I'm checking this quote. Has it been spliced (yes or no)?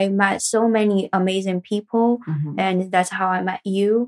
no